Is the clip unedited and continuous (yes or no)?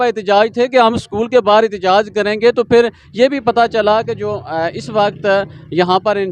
yes